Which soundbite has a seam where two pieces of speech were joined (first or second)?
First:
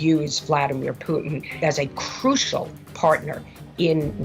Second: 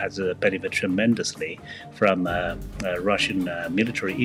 first